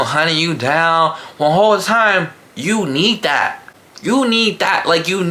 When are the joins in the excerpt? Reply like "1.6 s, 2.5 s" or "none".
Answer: none